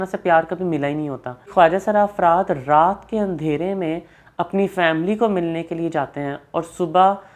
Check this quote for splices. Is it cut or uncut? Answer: cut